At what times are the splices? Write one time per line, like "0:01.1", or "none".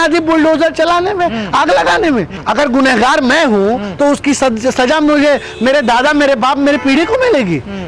0:02.3